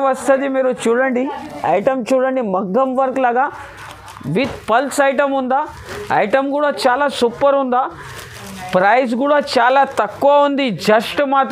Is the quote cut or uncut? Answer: uncut